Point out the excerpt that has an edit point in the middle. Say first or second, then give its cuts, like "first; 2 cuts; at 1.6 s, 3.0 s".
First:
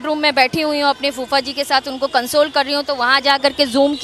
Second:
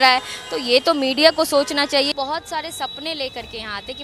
second; 1 cut; at 2.1 s